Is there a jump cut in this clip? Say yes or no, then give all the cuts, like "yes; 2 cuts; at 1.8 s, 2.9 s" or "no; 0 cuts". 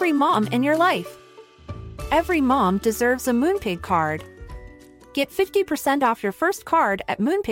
no; 0 cuts